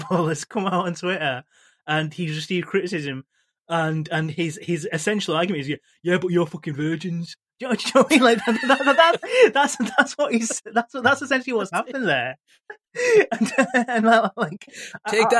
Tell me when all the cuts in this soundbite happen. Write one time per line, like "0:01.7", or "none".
none